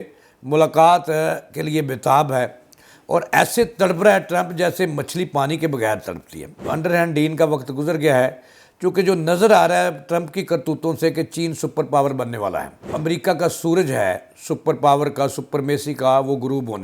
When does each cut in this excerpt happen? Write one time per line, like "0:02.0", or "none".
0:06.6
0:12.9